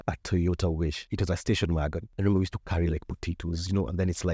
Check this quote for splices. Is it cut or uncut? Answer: cut